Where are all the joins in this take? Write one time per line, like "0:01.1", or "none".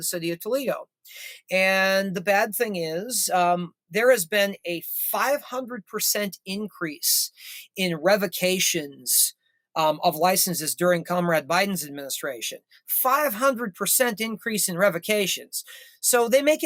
none